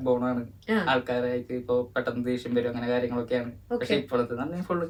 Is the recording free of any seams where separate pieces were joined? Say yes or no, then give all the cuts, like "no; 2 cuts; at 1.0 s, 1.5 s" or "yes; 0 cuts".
yes; 0 cuts